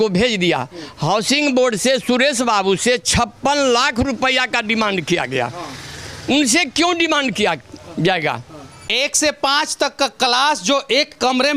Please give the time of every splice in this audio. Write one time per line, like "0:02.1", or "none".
0:08.8